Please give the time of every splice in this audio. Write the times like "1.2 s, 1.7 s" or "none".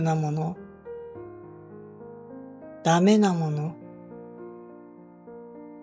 3.7 s